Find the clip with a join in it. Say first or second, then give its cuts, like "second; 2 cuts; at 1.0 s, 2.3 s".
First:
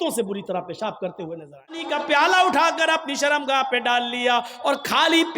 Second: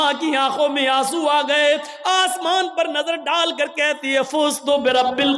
first; 1 cut; at 1.9 s